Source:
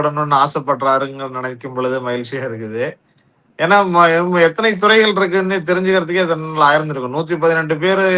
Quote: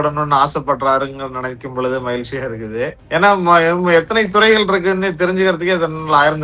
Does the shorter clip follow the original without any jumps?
no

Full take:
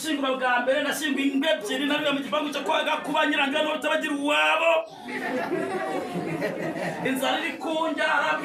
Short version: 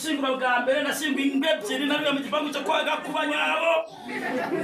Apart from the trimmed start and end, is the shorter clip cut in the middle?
yes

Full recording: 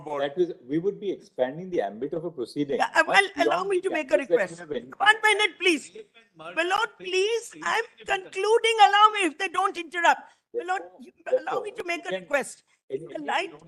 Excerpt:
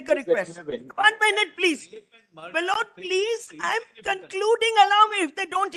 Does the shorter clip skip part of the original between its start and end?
no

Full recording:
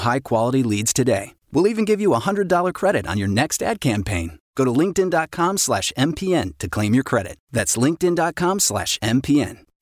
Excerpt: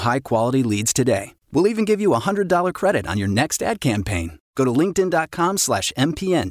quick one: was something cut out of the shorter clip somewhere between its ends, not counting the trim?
no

